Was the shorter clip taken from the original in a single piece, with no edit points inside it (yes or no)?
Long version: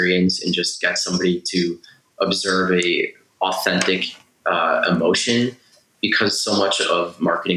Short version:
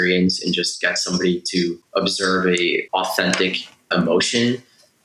no